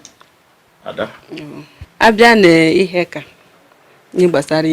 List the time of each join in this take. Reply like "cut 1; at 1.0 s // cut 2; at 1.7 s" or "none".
cut 1; at 1.8 s